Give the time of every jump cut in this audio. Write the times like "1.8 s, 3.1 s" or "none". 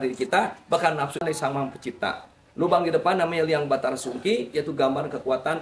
1.2 s